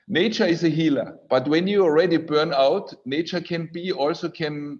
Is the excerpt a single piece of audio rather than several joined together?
no; 1 cut; at 1.2 s

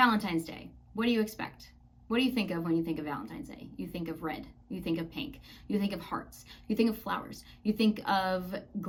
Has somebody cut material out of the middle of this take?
no; 0 cuts

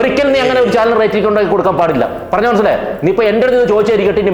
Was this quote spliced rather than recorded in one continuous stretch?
no; 0 cuts

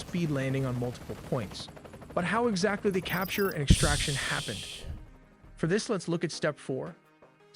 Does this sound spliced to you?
no; 0 cuts

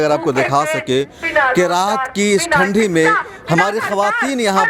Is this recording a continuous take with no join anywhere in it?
yes; 0 cuts

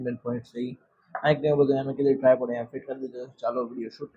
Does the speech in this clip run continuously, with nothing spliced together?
yes; 0 cuts

